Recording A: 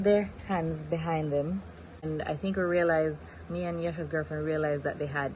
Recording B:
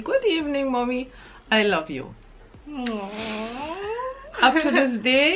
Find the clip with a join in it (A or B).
A